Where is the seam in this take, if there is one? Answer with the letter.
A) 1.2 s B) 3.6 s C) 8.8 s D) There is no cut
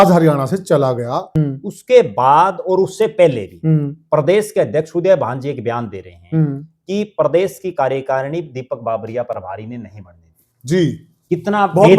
A